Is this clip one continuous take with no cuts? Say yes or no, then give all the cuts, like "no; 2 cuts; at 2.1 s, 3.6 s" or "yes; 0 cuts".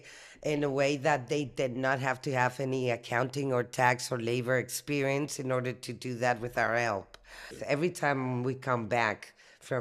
no; 1 cut; at 7.6 s